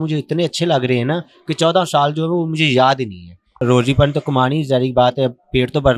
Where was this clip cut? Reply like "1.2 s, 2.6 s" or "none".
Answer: 3.6 s